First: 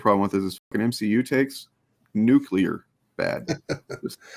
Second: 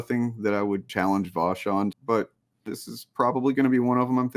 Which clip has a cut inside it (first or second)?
second